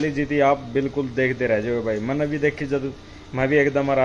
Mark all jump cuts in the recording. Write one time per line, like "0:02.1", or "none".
none